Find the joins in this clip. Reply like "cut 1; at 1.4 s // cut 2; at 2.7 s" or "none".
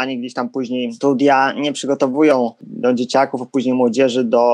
cut 1; at 0.9 s // cut 2; at 2.7 s